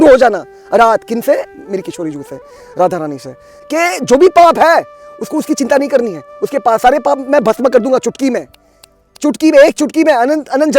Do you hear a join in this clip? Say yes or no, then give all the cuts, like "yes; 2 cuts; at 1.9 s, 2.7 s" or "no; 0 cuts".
yes; 1 cut; at 3.5 s